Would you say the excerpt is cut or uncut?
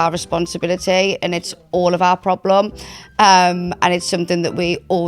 uncut